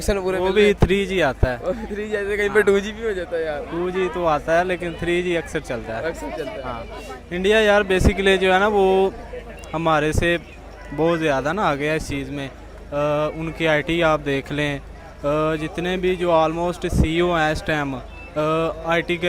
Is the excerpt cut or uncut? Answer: uncut